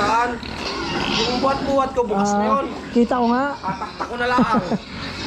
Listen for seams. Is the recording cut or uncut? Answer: uncut